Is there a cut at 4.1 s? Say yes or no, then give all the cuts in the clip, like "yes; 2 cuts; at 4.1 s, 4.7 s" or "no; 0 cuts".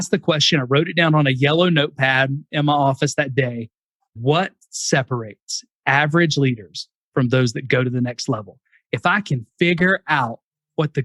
yes; 1 cut; at 4.1 s